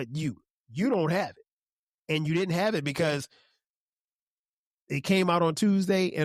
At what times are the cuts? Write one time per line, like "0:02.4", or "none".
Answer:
none